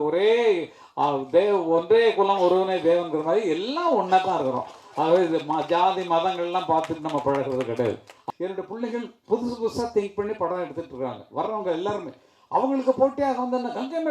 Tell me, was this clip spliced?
yes; 1 cut; at 8.2 s

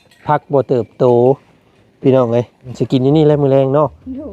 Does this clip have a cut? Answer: yes; 1 cut; at 2.6 s

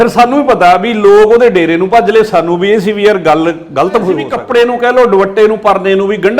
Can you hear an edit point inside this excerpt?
yes; 1 cut; at 4.3 s

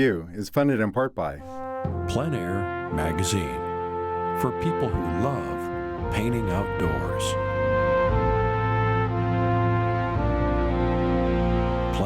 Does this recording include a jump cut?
yes; 1 cut; at 1.4 s

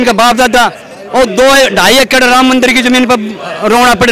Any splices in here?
no; 0 cuts

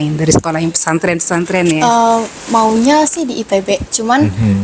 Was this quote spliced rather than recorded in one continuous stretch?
yes; 1 cut; at 2.4 s

